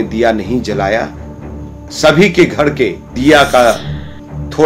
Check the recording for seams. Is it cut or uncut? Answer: cut